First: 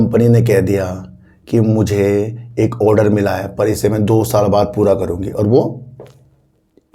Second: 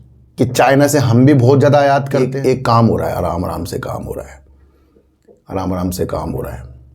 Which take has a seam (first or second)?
second